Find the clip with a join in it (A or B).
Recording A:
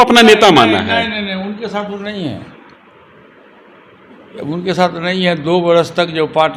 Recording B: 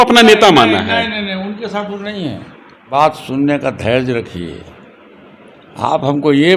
B